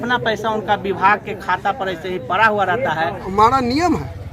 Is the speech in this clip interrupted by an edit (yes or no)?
yes